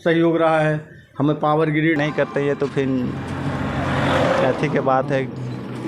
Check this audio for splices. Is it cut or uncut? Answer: cut